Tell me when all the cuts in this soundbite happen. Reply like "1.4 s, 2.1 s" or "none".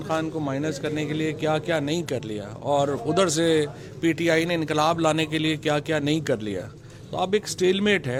none